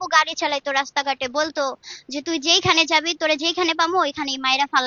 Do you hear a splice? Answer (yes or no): no